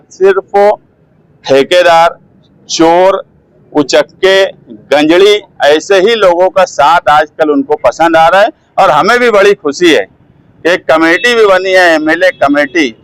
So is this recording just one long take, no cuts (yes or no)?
yes